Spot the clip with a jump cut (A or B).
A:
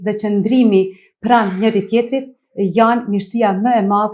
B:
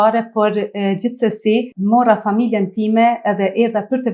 B